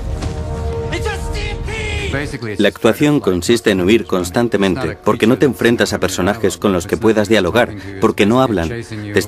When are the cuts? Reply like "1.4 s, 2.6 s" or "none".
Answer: none